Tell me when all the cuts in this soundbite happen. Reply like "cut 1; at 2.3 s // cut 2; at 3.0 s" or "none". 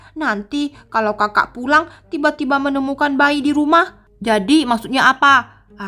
cut 1; at 4.1 s